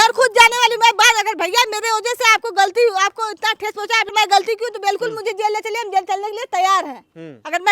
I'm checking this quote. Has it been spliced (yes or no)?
yes